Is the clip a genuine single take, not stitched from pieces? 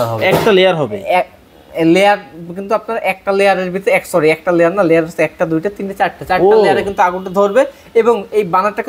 yes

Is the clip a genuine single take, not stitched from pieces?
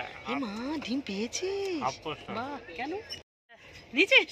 yes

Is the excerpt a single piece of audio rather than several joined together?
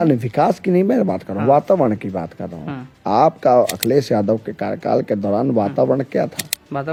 yes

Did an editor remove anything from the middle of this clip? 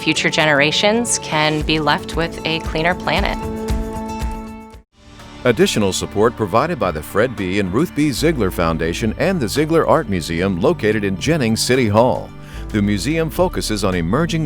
yes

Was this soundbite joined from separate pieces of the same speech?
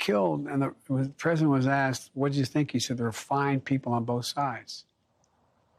no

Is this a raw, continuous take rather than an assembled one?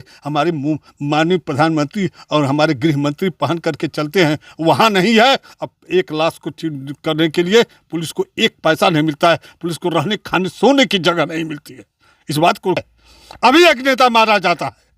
no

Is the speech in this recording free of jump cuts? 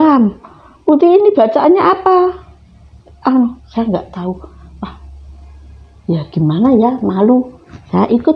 yes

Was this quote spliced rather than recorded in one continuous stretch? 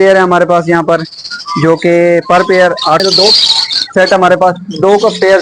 yes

